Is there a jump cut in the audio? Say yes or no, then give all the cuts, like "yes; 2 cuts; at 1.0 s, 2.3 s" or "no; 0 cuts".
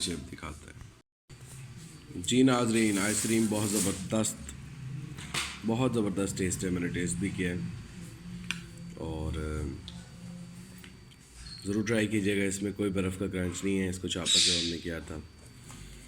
yes; 1 cut; at 1.1 s